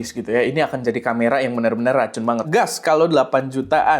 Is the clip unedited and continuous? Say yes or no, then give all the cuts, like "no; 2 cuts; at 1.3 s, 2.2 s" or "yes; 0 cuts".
no; 1 cut; at 2.4 s